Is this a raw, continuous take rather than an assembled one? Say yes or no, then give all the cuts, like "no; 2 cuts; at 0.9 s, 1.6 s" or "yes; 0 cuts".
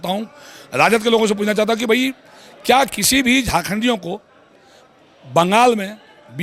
yes; 0 cuts